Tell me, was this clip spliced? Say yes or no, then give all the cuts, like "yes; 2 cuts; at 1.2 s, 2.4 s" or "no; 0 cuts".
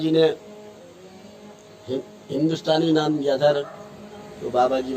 yes; 1 cut; at 3.6 s